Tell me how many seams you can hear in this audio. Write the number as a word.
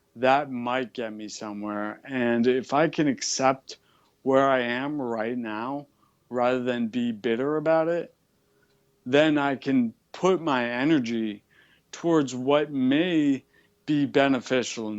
zero